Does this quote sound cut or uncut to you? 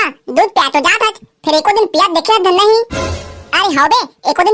uncut